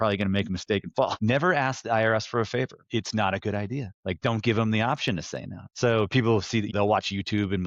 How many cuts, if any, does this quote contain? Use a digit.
5